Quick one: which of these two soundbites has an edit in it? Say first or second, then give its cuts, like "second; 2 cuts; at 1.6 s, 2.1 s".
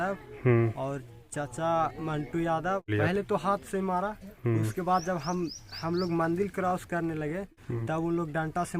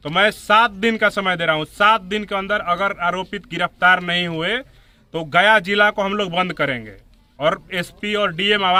first; 2 cuts; at 2.9 s, 7.5 s